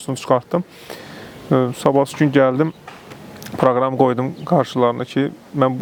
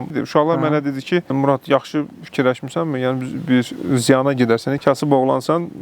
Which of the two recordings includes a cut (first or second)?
second